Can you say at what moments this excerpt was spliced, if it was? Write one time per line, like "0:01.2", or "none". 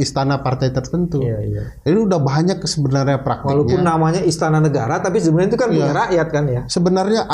none